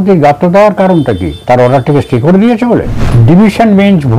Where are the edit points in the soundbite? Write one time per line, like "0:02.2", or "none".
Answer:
0:01.3
0:03.0